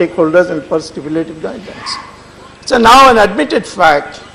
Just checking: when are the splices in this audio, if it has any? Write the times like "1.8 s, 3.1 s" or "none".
none